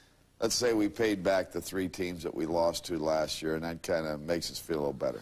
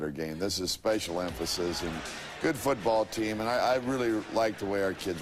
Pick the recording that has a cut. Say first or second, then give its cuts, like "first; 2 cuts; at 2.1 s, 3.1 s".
second; 1 cut; at 1.9 s